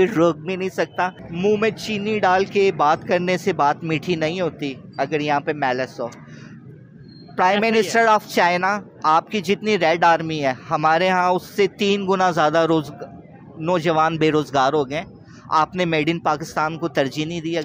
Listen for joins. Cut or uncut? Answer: cut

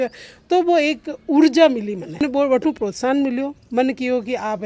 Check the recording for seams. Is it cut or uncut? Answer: cut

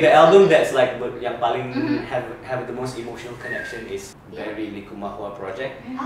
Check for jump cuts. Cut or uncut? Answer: cut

